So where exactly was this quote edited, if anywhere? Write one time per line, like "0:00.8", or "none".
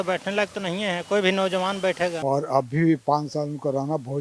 0:02.2